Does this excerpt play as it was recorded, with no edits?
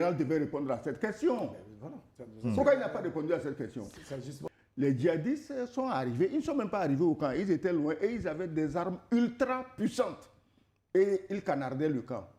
no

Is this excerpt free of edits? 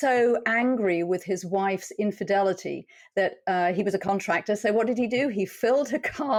yes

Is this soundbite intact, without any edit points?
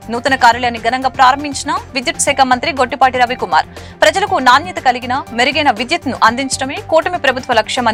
yes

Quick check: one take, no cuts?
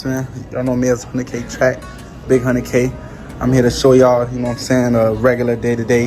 yes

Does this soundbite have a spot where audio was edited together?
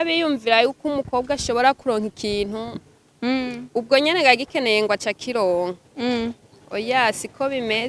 no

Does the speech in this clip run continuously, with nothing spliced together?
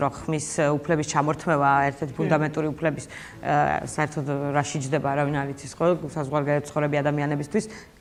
yes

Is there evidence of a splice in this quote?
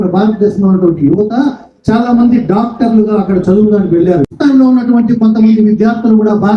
yes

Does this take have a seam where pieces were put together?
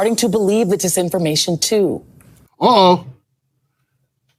no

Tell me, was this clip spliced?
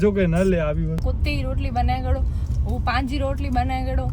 yes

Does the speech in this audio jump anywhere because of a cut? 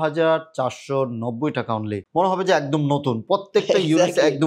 yes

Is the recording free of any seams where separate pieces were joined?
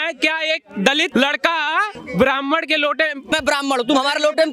no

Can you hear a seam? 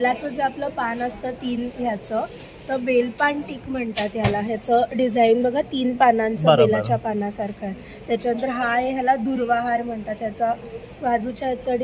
no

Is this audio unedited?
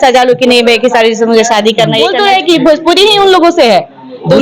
no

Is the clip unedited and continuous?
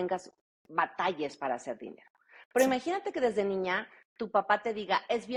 yes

